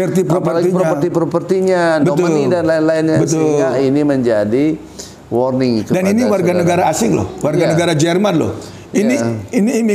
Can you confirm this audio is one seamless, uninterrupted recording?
yes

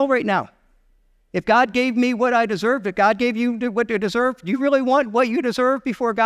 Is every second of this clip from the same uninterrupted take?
yes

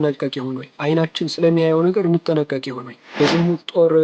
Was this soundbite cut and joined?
yes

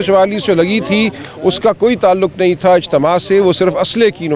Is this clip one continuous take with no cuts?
yes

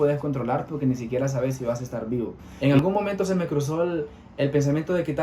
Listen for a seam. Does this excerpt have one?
yes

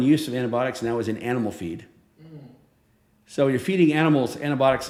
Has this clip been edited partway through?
no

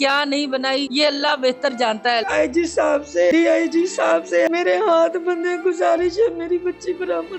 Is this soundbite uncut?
no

